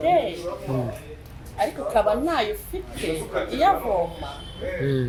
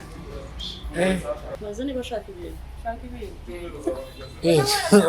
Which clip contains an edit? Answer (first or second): second